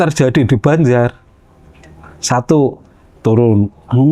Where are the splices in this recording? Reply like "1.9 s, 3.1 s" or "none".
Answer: none